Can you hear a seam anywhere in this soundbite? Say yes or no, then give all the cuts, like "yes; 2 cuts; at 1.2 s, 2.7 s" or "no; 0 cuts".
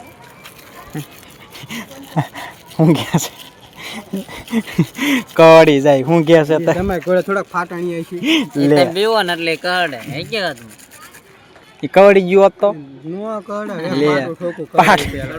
no; 0 cuts